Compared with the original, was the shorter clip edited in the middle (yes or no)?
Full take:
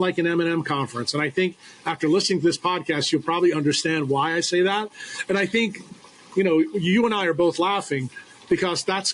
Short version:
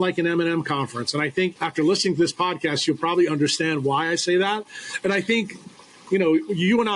yes